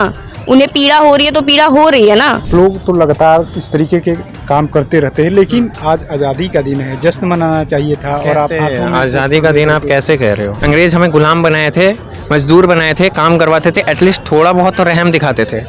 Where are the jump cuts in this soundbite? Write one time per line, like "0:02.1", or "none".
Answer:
0:02.4
0:10.5